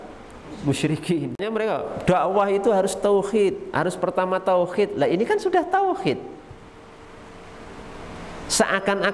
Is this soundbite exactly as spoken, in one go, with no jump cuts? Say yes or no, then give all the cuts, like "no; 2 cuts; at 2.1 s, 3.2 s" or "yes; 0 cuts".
no; 1 cut; at 1.4 s